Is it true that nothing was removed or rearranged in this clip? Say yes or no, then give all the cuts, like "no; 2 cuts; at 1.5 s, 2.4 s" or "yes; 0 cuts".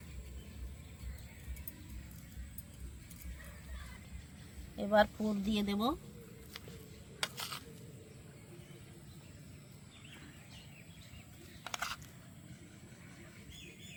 yes; 0 cuts